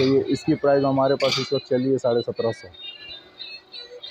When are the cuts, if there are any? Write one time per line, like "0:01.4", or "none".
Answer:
none